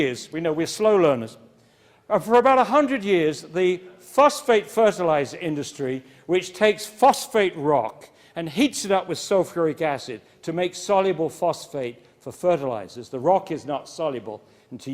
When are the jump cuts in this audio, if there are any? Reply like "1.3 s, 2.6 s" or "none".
6.5 s

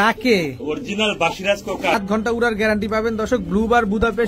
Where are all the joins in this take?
1.9 s

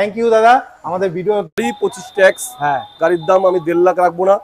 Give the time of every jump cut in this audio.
1.6 s

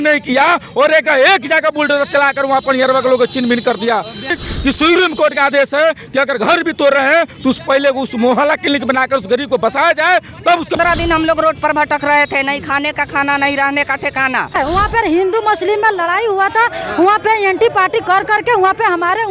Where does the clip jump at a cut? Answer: 4.4 s, 10.8 s, 14.5 s

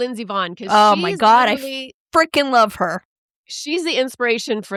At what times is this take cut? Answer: none

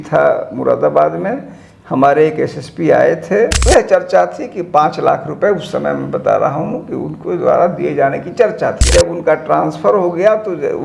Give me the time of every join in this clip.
3.6 s, 8.8 s

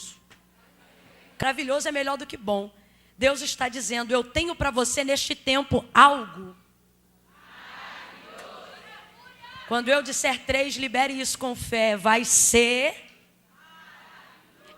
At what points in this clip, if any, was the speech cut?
1.4 s

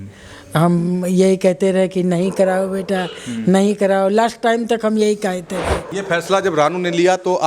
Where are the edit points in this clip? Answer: 5.9 s

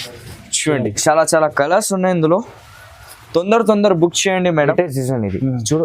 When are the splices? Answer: 4.7 s

